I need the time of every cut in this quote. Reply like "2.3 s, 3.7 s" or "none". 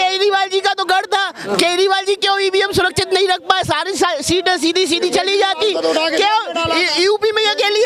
none